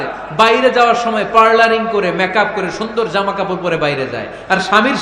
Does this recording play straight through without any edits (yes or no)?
yes